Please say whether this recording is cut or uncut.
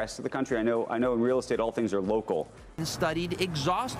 cut